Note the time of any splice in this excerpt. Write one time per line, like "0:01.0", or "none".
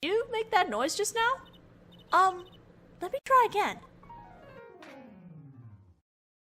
0:04.1